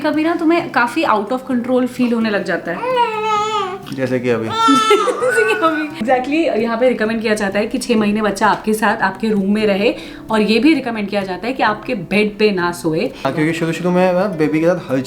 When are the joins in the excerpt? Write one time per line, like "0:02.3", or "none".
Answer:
0:06.0
0:13.2